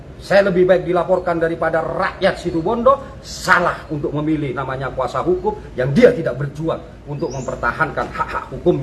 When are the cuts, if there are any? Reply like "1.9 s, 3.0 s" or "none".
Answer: none